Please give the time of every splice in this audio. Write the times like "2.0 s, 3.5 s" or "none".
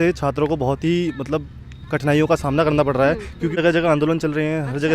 3.5 s